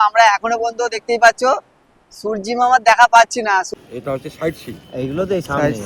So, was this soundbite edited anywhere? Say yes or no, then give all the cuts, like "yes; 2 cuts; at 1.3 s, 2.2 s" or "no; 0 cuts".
yes; 1 cut; at 3.7 s